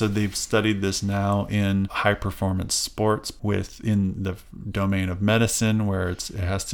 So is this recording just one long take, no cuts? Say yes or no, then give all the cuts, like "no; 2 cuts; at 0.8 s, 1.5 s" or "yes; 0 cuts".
no; 2 cuts; at 1.9 s, 3.3 s